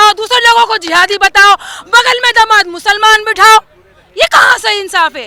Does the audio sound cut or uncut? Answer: uncut